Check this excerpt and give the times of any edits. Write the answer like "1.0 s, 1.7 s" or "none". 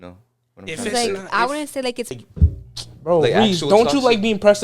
2.1 s